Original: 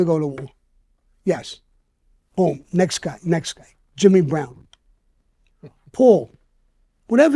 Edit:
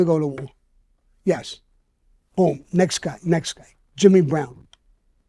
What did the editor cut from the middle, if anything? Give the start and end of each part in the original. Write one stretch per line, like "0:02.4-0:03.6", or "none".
none

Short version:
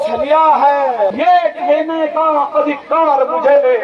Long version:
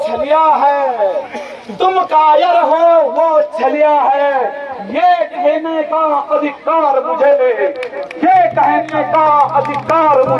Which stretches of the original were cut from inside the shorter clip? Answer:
0:01.1-0:04.9

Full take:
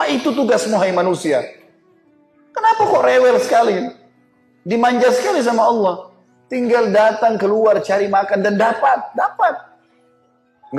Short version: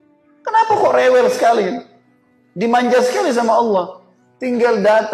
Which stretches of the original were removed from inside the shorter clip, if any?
none

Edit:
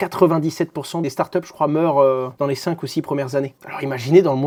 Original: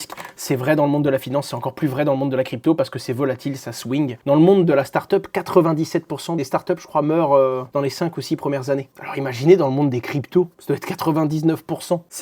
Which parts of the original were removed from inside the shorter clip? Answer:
none

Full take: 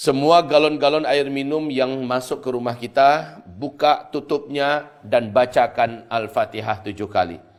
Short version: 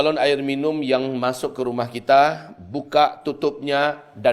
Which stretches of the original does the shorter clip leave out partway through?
none

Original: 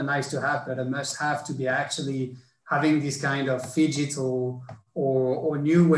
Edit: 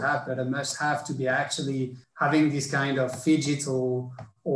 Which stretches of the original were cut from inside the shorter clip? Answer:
0:02.4-0:02.5

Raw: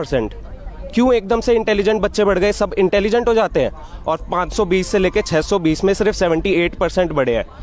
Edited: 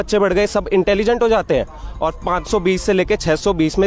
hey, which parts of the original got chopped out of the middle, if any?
none

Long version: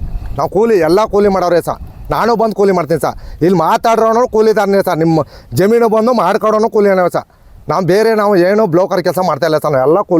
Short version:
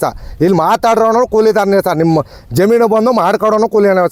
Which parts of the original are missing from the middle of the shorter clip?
none

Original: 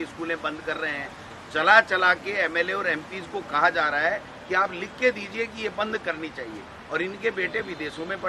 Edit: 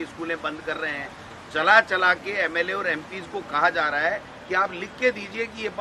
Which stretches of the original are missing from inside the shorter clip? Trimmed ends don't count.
none

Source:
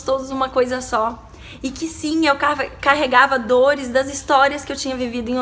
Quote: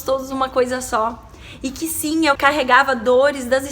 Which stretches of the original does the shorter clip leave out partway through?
0:02.4-0:02.8

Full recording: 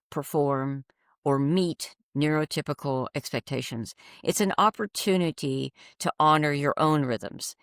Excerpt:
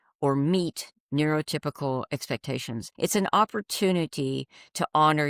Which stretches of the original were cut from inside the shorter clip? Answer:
0:03.9-0:04.1

